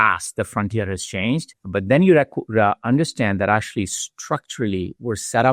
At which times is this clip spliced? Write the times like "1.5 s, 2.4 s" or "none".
1.6 s